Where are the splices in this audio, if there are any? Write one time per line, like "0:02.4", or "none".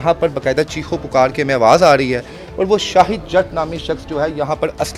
none